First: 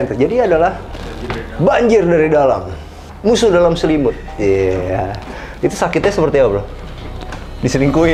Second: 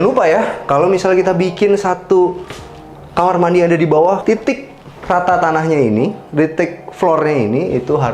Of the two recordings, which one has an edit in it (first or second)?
second